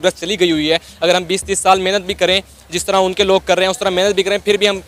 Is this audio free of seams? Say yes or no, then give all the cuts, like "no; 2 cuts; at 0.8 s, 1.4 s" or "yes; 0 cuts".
yes; 0 cuts